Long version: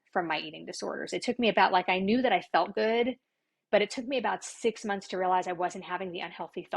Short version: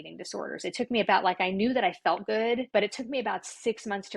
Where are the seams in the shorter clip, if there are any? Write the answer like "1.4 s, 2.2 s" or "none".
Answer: 2.7 s